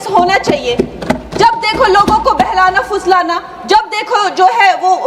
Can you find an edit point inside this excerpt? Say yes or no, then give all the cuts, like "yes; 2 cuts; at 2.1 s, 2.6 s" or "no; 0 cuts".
no; 0 cuts